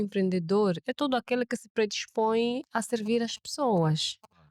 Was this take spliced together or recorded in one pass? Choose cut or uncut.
uncut